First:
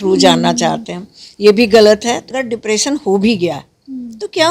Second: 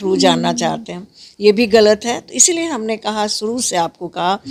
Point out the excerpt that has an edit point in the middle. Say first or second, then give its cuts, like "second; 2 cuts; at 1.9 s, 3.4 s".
first; 1 cut; at 2.3 s